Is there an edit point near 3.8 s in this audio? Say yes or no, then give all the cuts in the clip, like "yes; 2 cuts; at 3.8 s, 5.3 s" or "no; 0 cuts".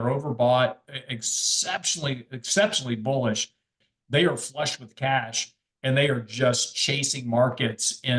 yes; 1 cut; at 3.8 s